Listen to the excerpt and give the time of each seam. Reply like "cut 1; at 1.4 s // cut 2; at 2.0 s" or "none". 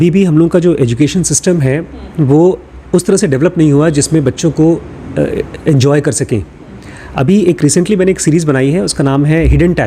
none

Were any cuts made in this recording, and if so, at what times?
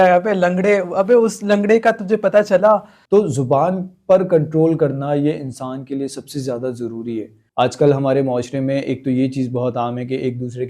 cut 1; at 2.9 s // cut 2; at 7.4 s

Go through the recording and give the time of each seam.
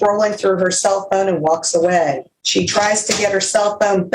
cut 1; at 2.3 s

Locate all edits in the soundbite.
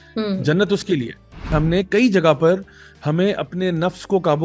cut 1; at 1.5 s

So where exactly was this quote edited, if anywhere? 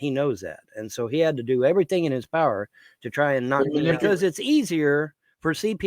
cut 1; at 4.0 s

